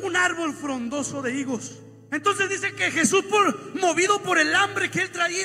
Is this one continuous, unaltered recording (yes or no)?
yes